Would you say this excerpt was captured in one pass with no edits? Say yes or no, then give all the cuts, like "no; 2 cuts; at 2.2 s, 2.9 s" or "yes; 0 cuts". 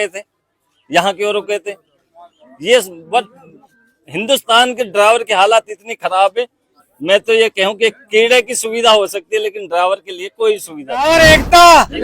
no; 1 cut; at 11.0 s